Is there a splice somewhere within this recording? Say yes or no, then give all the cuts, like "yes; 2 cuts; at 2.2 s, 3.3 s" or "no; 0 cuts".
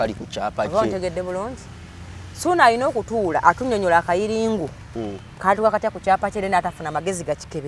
no; 0 cuts